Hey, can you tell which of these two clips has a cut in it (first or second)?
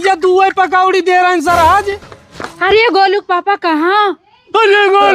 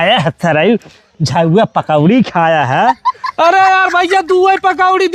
first